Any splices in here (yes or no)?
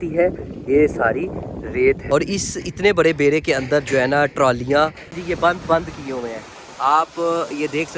yes